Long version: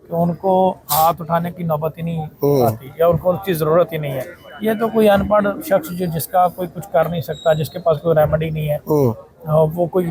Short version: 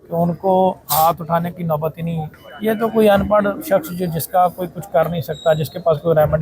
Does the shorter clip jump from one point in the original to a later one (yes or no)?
yes